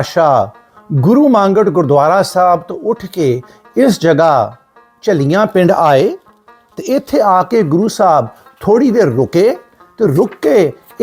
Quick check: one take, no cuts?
yes; 0 cuts

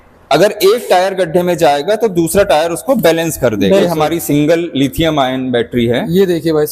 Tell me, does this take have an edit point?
yes; 1 cut; at 3.8 s

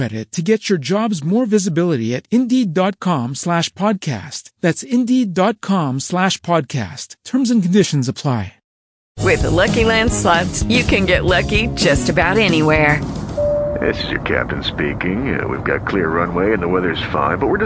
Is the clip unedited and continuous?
no; 1 cut; at 8.9 s

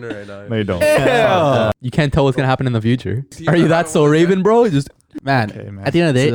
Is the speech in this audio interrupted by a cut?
yes; 3 cuts; at 1.7 s, 3.3 s, 5.1 s

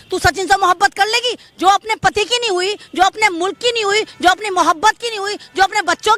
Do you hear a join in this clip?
no; 0 cuts

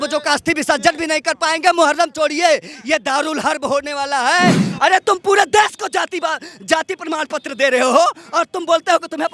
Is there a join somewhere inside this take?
yes; 1 cut; at 4.7 s

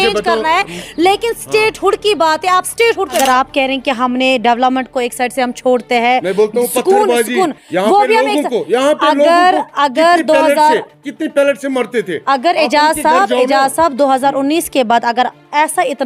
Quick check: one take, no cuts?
no; 1 cut; at 3.2 s

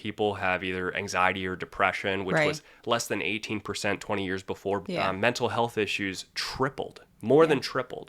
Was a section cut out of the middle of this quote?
yes; 1 cut; at 4.8 s

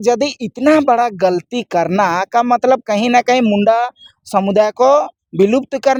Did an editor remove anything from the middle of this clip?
no; 0 cuts

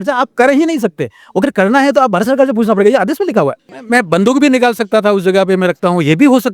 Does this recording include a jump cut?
yes; 1 cut; at 3.7 s

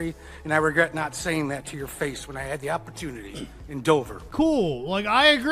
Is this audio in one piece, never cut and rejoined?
no; 1 cut; at 4.2 s

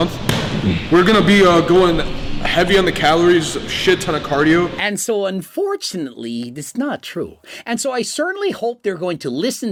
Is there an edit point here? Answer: no; 0 cuts

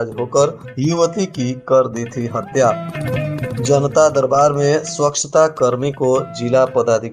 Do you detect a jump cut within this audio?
no; 0 cuts

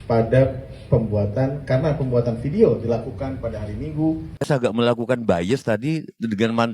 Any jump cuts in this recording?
yes; 1 cut; at 4.3 s

